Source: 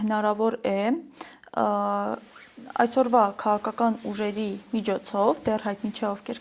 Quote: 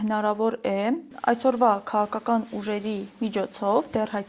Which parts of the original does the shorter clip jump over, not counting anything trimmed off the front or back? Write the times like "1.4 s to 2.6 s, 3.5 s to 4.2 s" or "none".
1.1 s to 2.6 s